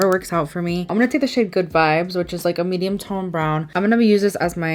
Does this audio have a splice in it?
no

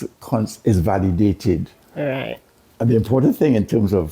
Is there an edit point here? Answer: no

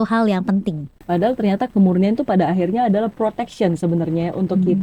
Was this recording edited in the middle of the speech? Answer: no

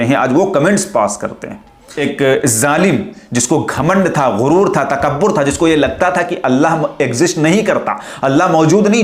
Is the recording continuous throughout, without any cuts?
no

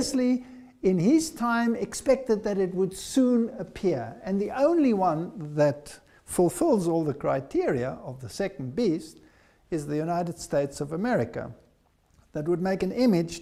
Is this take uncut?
yes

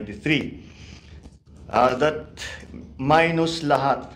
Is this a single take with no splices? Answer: yes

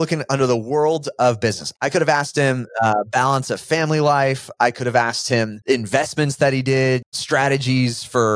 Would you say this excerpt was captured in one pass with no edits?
no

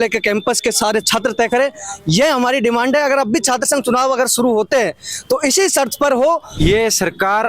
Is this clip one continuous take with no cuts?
no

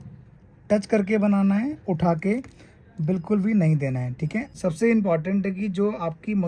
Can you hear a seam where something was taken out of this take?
yes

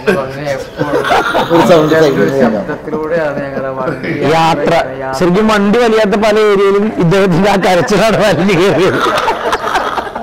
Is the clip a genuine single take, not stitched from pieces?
yes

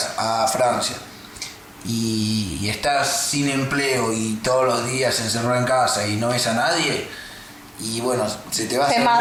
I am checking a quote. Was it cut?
no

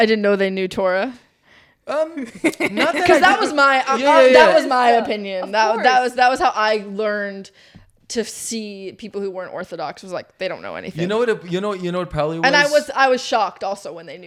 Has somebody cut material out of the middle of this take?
no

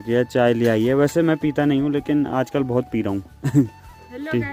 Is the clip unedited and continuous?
yes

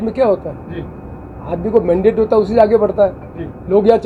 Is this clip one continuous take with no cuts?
yes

